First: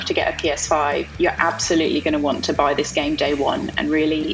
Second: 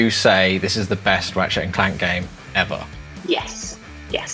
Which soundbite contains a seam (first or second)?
first